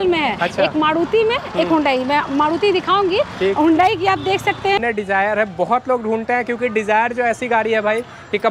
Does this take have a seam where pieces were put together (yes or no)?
yes